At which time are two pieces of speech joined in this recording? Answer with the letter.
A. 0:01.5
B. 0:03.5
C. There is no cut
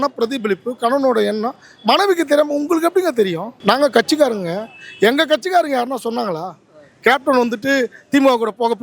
B